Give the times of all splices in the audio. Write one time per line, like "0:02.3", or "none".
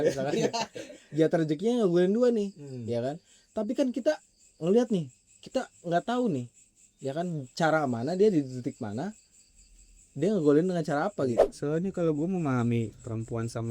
0:11.5

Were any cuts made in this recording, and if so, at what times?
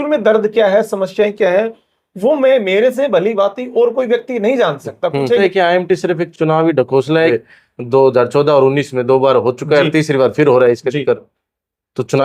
0:05.4
0:07.3

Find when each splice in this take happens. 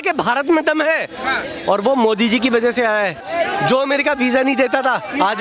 0:03.2

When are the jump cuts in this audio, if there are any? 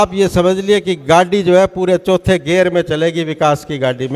none

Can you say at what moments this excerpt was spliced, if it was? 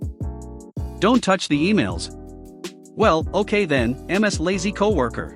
0:01.0

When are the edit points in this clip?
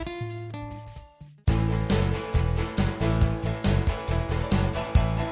none

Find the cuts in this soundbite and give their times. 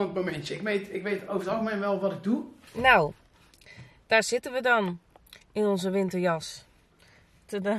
0:02.6

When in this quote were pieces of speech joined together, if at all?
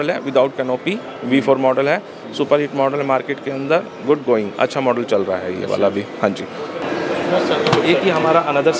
0:06.8

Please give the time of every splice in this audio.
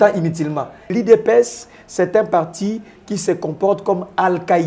0:00.9

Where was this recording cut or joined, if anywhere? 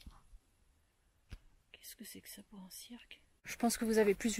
0:03.4

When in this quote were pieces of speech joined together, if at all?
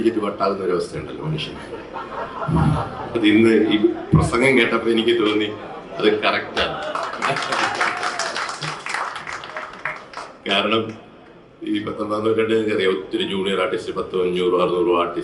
none

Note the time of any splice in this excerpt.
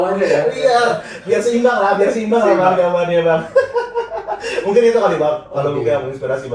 none

